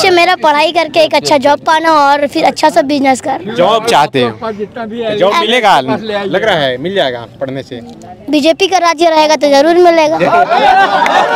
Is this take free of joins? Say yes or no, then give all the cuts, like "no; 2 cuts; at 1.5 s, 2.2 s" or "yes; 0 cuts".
yes; 0 cuts